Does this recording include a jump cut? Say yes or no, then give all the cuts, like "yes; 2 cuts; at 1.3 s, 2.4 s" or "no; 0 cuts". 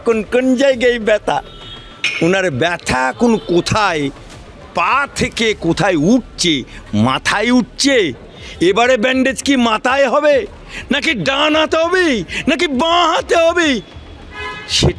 no; 0 cuts